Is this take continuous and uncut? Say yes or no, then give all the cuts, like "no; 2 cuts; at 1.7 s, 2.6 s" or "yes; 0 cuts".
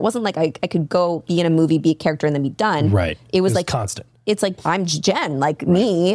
no; 1 cut; at 4.6 s